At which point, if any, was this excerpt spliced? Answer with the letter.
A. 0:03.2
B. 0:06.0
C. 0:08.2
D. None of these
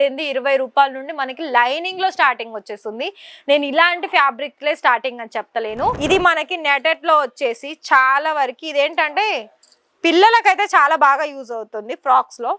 B